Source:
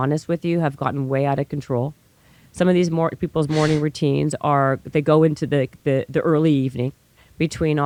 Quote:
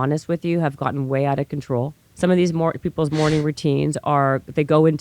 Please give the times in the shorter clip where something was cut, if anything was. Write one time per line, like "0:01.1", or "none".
0:02.0